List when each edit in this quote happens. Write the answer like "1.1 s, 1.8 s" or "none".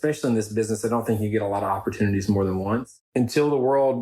3.0 s